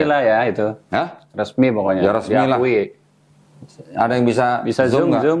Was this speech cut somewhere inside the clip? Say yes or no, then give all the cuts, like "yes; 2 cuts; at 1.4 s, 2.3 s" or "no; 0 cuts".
no; 0 cuts